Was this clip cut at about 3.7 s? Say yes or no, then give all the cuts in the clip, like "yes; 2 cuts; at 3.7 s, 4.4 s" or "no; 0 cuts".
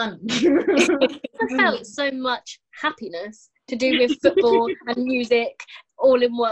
no; 1 cut; at 1.4 s